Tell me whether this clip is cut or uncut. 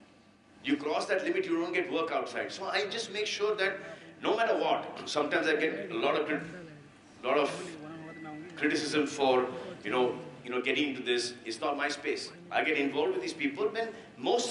uncut